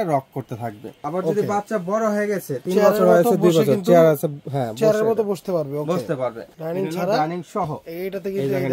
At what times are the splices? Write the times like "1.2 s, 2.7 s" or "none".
1.0 s, 6.5 s